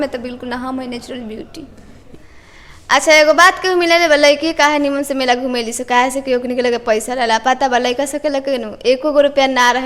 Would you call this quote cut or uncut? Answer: cut